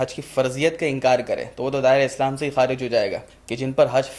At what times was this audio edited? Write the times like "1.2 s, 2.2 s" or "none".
3.3 s